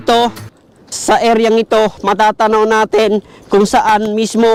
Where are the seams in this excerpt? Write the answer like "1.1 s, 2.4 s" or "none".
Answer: none